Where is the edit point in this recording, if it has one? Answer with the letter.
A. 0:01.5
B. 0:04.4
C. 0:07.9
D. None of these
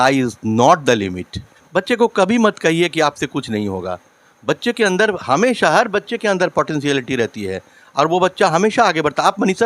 A